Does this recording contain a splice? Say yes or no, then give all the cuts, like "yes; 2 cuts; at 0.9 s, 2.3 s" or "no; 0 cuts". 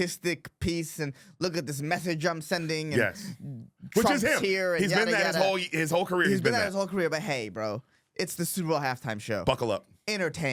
no; 0 cuts